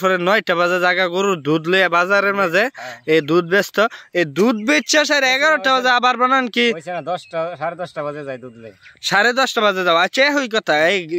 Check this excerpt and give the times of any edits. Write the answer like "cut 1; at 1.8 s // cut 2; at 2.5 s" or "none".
none